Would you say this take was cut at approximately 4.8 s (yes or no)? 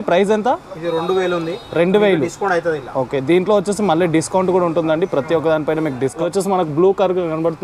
no